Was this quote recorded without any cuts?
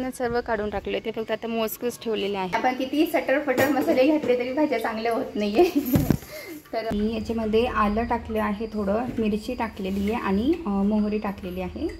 no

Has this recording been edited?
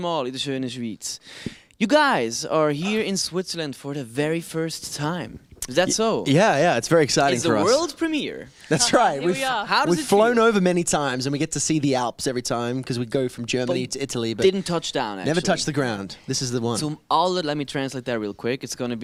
no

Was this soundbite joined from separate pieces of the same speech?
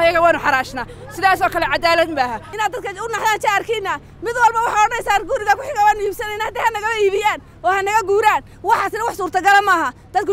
yes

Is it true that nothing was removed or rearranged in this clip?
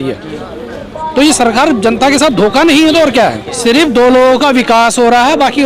no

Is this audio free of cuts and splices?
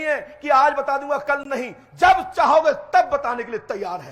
yes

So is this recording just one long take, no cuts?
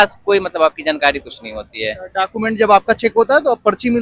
yes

